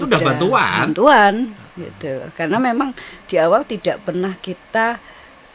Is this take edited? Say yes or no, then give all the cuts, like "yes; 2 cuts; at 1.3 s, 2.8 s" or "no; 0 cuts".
no; 0 cuts